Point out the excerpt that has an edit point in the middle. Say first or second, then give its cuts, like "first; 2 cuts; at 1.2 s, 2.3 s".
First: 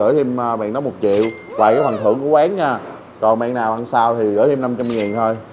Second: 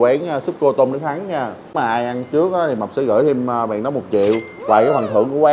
second; 1 cut; at 1.9 s